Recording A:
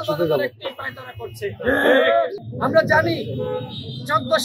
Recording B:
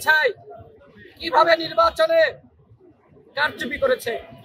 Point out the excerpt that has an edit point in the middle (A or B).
A